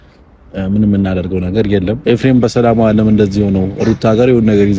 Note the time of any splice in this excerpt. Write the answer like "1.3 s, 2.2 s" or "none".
1.9 s